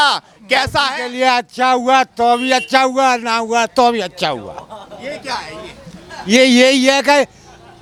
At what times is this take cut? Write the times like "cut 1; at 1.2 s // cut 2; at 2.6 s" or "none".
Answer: none